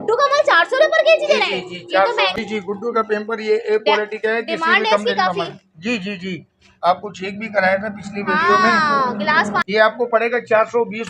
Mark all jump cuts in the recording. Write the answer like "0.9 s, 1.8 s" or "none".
2.3 s, 9.6 s